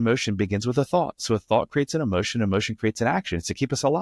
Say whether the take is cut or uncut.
uncut